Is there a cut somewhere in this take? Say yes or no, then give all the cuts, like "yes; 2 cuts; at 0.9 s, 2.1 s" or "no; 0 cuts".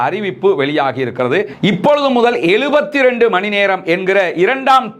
yes; 1 cut; at 1.5 s